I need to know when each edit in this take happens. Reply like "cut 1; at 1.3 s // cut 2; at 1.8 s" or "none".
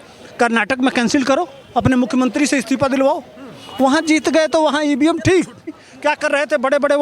cut 1; at 5.9 s